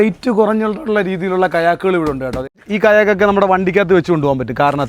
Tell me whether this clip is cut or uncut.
cut